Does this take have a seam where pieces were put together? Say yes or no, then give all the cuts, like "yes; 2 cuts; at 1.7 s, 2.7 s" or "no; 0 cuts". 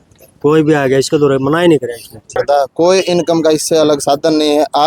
yes; 1 cut; at 2.4 s